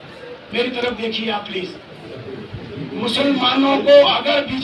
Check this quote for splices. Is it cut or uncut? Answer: uncut